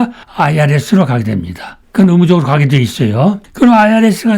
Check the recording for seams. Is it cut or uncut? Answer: uncut